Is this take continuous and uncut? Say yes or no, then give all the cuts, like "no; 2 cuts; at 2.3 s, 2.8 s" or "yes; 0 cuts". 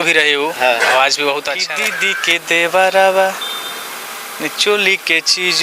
no; 1 cut; at 1.6 s